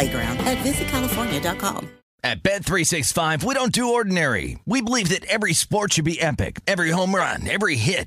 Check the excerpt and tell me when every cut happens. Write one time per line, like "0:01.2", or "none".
0:02.0